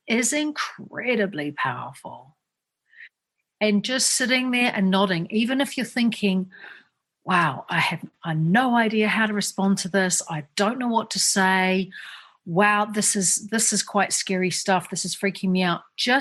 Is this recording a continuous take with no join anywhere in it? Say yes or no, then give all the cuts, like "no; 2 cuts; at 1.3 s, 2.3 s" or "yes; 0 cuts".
yes; 0 cuts